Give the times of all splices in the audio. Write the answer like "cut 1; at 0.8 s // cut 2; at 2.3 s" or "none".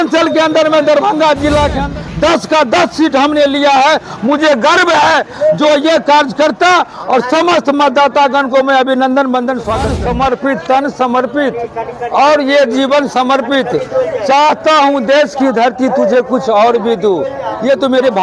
cut 1; at 1.8 s // cut 2; at 9.9 s